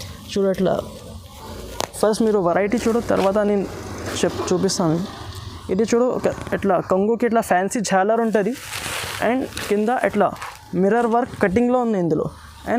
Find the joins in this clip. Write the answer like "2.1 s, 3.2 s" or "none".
none